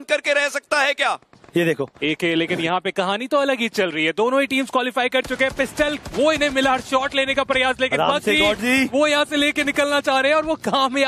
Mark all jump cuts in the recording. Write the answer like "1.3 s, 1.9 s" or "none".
1.3 s